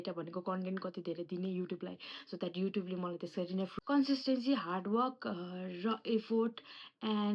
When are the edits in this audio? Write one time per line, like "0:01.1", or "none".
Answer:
0:03.8